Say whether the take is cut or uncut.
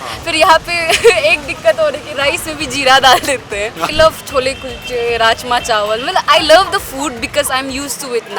cut